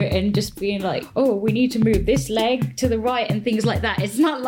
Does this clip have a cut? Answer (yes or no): yes